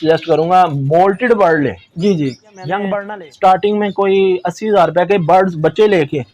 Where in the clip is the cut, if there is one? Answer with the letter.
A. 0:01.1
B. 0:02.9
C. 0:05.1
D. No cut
B